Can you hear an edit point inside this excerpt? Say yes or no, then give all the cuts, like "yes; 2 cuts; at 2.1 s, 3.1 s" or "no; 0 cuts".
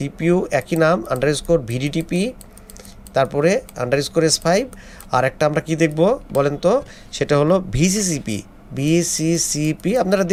no; 0 cuts